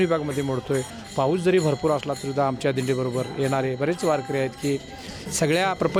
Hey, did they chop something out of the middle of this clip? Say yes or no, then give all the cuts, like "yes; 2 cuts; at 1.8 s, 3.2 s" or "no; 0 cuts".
no; 0 cuts